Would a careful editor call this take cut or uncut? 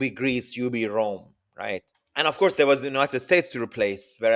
cut